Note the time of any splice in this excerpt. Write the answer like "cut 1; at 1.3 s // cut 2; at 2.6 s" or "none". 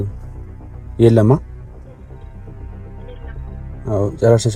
cut 1; at 1.4 s // cut 2; at 3.8 s